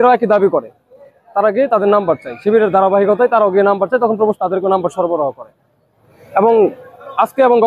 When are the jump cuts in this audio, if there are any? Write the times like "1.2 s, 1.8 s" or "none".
none

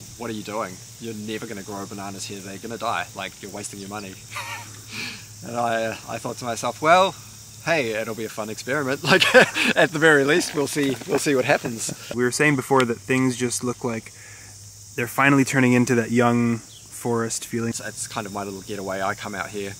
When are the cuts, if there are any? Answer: 12.1 s, 17.7 s

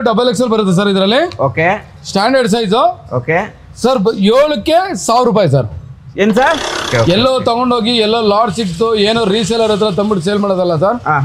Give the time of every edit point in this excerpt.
6.9 s

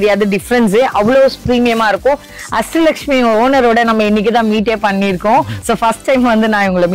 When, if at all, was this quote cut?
2.3 s

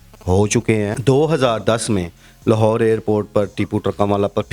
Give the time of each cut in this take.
1.0 s

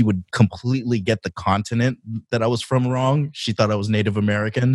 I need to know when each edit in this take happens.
none

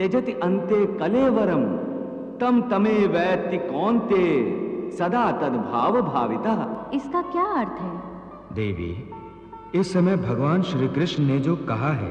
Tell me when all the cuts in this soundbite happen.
6.8 s

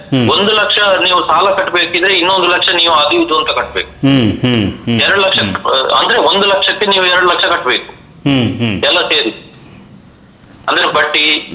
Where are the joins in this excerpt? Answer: none

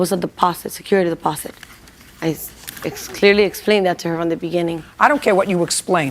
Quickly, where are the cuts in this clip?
4.8 s

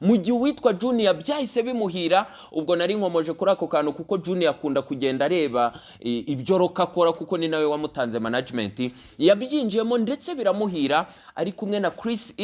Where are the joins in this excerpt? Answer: none

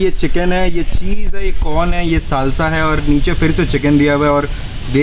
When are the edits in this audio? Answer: none

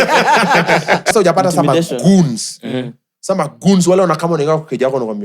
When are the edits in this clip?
1.1 s

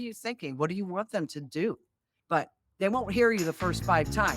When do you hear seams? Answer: 2.1 s

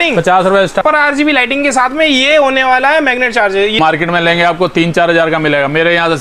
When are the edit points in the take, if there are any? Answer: 0.8 s, 3.8 s

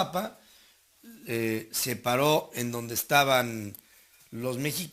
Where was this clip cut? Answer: none

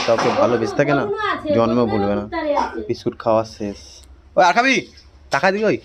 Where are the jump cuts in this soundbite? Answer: 2.8 s

